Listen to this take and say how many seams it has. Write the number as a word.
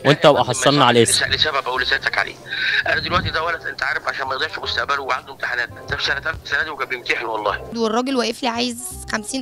one